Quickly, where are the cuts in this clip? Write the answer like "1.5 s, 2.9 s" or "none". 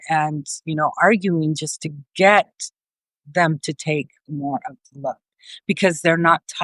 none